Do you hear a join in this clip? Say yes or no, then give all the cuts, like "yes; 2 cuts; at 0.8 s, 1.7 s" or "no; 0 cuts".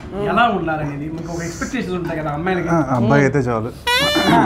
no; 0 cuts